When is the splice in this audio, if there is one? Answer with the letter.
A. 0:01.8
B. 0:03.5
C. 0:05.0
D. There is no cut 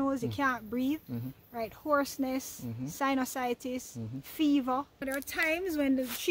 C